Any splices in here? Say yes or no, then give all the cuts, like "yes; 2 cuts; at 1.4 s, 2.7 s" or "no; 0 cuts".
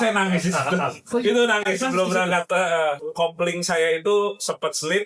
yes; 1 cut; at 3.0 s